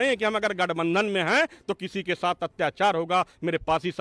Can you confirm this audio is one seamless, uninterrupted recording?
yes; 0 cuts

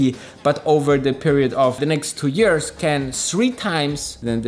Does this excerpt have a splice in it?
yes; 1 cut; at 1.8 s

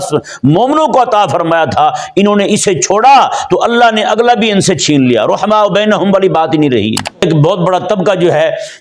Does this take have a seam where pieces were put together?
yes; 1 cut; at 7.2 s

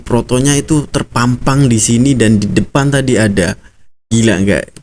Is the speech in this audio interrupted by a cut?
no; 0 cuts

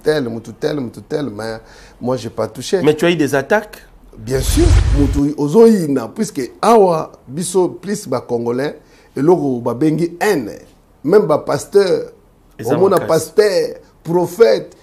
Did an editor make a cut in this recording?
yes; 1 cut; at 4.7 s

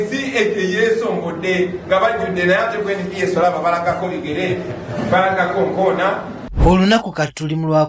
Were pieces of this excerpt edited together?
yes; 1 cut; at 6.3 s

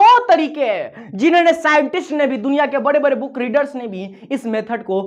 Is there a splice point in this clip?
no; 0 cuts

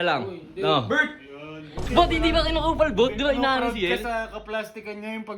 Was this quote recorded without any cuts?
no; 1 cut; at 1.9 s

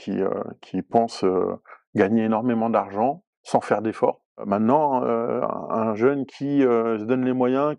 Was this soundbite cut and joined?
yes; 2 cuts; at 3.3 s, 4.4 s

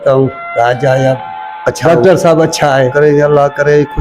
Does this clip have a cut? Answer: yes; 2 cuts; at 1.8 s, 2.9 s

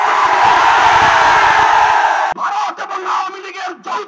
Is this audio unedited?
no; 1 cut; at 2.3 s

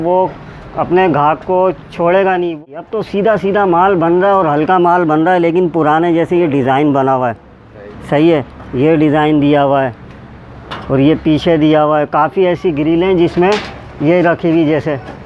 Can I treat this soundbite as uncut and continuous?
no; 1 cut; at 2.6 s

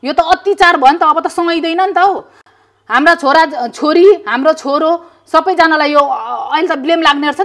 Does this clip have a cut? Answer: no; 0 cuts

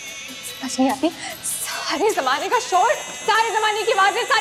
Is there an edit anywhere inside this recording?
no; 0 cuts

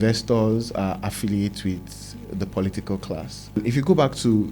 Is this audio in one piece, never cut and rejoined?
no; 1 cut; at 3.6 s

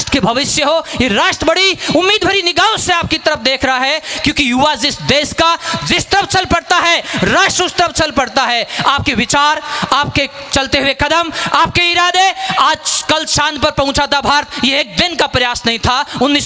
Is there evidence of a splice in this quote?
no; 0 cuts

